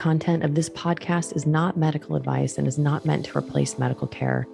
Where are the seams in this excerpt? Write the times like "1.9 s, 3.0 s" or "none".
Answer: none